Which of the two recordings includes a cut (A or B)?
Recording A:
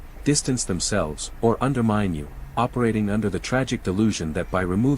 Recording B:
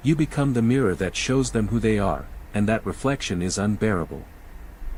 A